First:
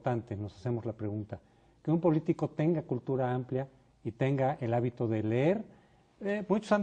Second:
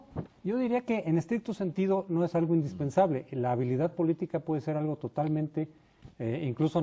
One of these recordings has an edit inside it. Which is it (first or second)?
second